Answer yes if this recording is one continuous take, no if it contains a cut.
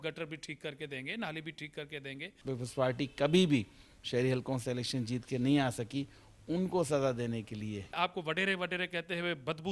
no